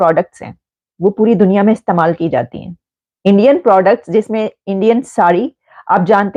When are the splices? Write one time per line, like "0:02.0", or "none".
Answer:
none